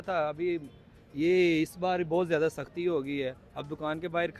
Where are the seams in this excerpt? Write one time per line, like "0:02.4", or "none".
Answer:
none